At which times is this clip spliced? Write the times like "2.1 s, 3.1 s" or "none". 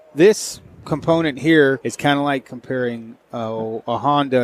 1.8 s